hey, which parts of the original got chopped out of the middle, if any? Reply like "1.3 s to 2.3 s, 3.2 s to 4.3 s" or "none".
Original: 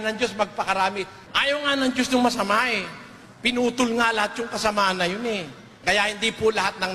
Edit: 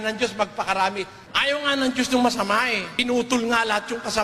2.9 s to 3.3 s